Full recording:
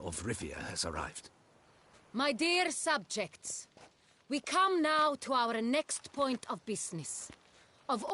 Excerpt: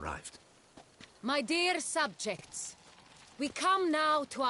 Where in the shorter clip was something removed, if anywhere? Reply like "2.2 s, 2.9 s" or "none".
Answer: none